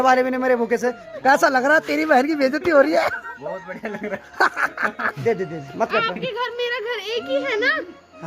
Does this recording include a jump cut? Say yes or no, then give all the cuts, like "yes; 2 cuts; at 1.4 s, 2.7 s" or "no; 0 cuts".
yes; 2 cuts; at 1.1 s, 5.1 s